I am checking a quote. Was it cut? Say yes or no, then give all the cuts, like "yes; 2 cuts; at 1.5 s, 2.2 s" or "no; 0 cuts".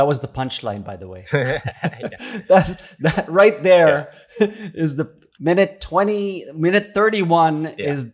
no; 0 cuts